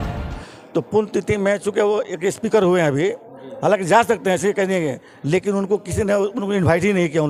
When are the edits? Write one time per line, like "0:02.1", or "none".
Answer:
none

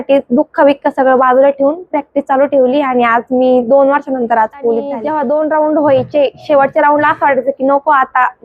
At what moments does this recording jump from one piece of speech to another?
0:05.0

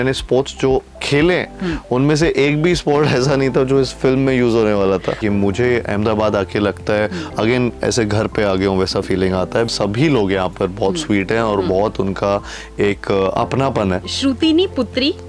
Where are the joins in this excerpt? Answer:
0:05.2
0:09.7
0:14.1

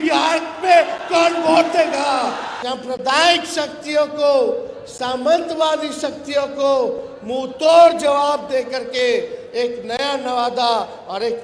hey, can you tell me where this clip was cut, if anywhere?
0:02.5

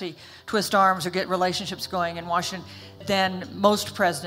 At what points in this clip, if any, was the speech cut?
0:03.0

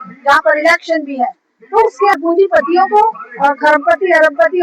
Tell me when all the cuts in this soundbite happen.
0:02.1

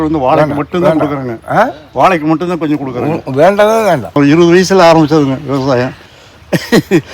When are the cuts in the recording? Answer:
0:04.2

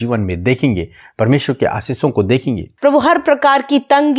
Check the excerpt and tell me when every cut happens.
0:02.8

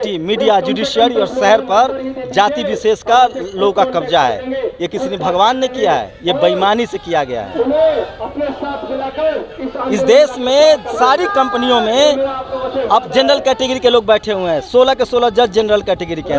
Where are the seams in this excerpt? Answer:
none

